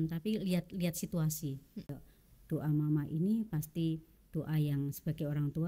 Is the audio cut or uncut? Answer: cut